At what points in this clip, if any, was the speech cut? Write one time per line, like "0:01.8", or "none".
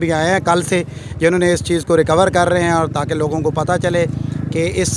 none